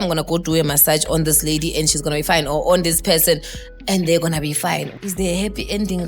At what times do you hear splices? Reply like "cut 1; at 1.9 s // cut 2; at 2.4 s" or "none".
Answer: cut 1; at 4.9 s